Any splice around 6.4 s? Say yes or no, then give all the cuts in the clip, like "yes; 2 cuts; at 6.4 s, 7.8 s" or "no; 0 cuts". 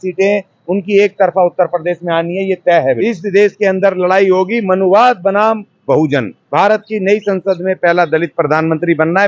yes; 2 cuts; at 2.9 s, 6.4 s